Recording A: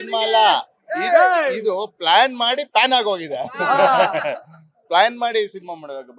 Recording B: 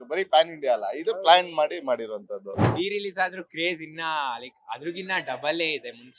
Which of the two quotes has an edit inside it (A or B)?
B